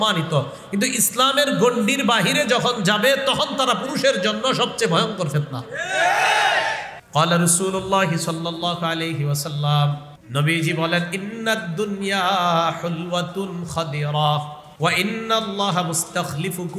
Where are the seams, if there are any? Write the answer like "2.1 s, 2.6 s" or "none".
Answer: 6.9 s, 10.1 s, 14.6 s

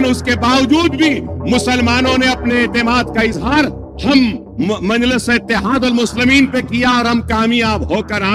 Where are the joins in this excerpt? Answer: none

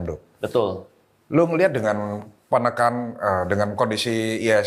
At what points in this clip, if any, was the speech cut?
none

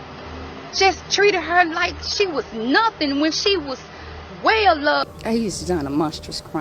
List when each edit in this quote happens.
5.1 s

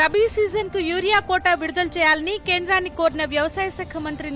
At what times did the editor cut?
none

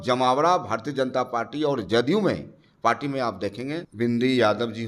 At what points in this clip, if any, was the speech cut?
3.9 s

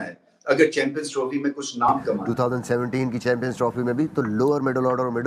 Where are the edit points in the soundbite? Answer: 2.2 s

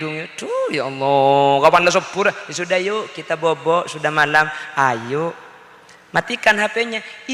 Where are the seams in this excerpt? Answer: none

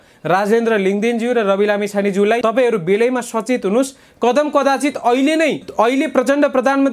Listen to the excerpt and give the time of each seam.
2.4 s, 5.7 s

